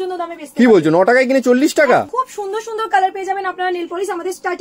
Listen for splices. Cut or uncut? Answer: cut